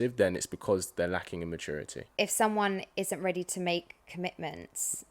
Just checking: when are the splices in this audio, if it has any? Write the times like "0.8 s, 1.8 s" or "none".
2.0 s